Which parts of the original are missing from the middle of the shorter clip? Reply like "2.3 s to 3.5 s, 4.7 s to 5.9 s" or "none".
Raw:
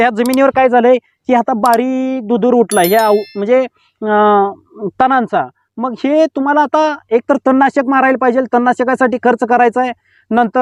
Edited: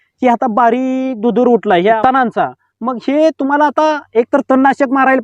3.0 s to 4.9 s